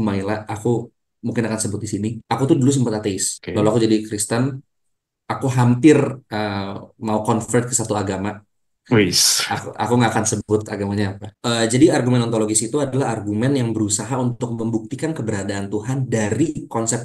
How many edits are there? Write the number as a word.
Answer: three